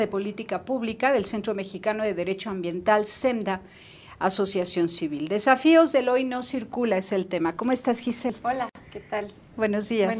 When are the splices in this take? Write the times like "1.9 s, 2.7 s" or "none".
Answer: none